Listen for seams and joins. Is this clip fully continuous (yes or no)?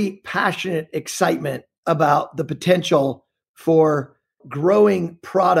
no